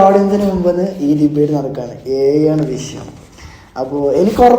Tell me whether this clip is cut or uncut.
uncut